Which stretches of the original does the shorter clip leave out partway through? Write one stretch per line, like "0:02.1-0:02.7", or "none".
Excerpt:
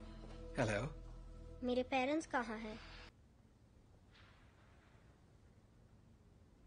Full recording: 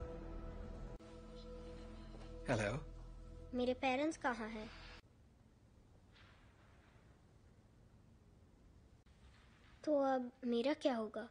0:05.0-0:05.1